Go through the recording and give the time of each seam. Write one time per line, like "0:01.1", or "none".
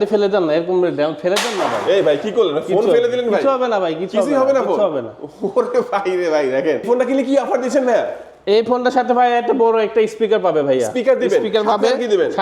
0:06.9